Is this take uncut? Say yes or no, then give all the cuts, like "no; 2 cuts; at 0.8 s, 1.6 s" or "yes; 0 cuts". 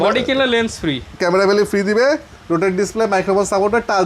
yes; 0 cuts